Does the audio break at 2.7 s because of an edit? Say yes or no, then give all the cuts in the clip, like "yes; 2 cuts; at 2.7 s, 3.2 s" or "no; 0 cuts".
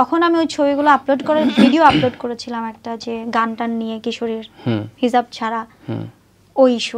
no; 0 cuts